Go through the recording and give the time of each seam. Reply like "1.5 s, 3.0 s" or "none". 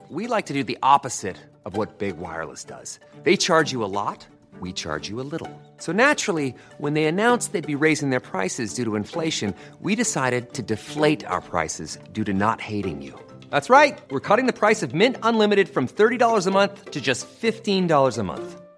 none